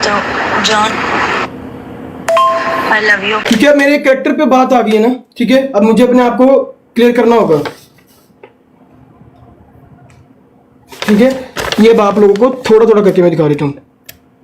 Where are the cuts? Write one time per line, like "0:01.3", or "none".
0:03.4